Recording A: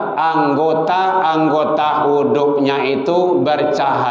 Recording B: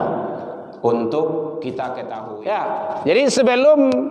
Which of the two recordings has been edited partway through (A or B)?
B